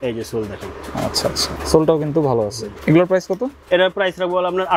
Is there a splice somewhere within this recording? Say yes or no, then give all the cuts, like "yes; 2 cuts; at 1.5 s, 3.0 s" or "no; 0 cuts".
yes; 1 cut; at 2.7 s